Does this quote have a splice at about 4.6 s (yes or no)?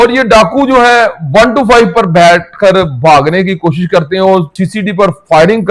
yes